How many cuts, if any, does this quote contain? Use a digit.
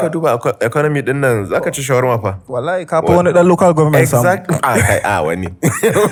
0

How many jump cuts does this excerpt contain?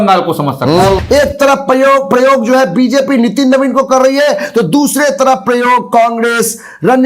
1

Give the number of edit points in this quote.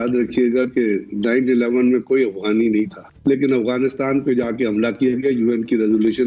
1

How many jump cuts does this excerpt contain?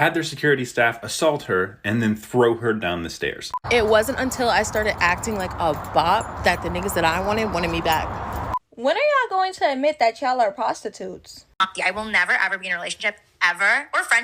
3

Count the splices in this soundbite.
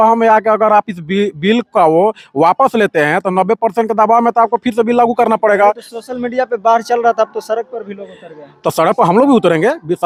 0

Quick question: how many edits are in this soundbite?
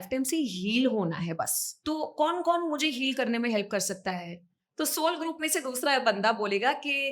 1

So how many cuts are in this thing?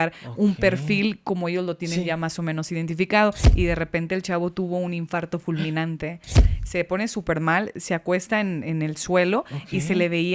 2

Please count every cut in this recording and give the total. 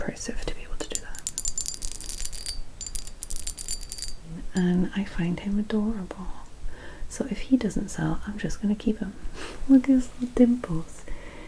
1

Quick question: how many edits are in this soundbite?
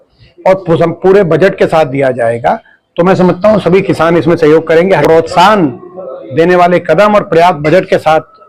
1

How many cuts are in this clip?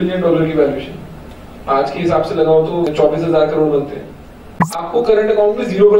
2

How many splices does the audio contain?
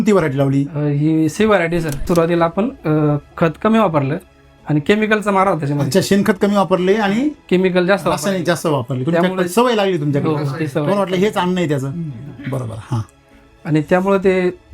1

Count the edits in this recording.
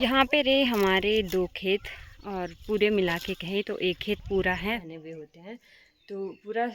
1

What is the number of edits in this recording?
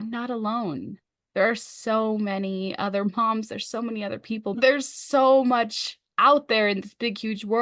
1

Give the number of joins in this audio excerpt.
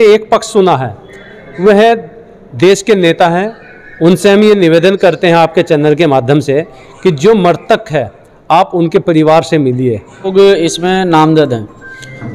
1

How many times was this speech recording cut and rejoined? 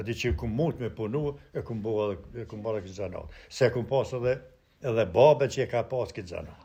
0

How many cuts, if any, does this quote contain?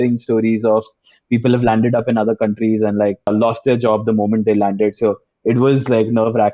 1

